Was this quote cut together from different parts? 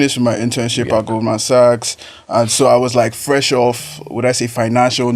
no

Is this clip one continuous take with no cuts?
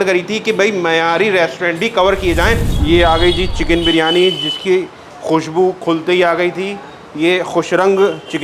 no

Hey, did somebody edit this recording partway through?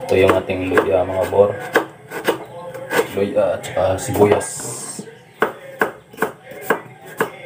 no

